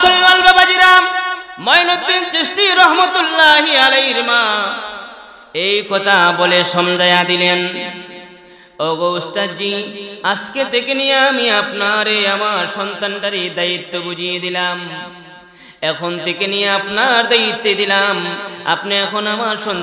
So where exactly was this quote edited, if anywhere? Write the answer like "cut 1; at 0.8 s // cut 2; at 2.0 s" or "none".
cut 1; at 1.5 s